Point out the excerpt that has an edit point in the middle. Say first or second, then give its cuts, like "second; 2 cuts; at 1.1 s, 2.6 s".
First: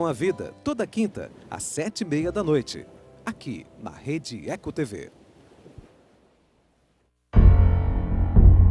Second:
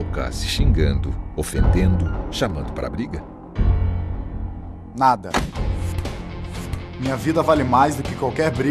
first; 1 cut; at 7.1 s